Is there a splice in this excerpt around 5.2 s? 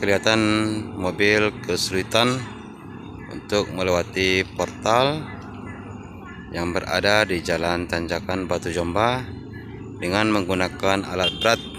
no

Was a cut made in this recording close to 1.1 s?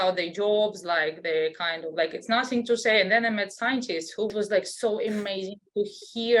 no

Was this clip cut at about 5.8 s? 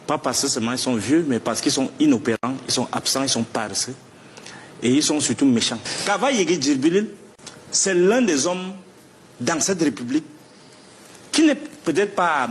yes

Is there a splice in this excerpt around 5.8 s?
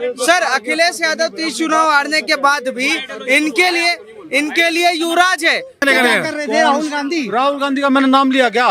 yes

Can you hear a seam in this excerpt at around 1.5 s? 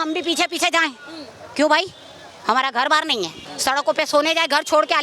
no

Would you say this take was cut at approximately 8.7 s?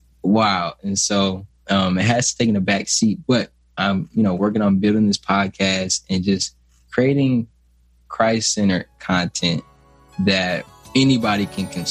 no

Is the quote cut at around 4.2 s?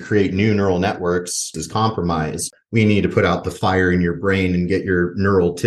no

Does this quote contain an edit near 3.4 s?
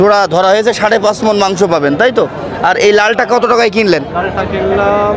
no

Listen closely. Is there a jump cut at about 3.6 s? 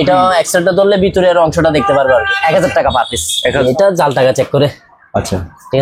yes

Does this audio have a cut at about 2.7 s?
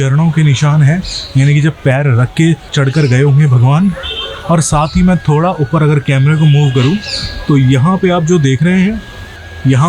yes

